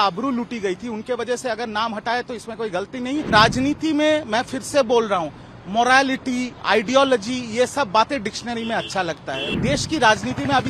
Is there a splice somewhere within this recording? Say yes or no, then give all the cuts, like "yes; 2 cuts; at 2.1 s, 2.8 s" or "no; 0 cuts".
yes; 2 cuts; at 3.3 s, 9.5 s